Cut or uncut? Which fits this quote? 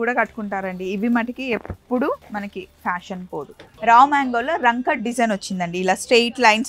cut